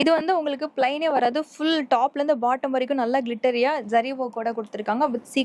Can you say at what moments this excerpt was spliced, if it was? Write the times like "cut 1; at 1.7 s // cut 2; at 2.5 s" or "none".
none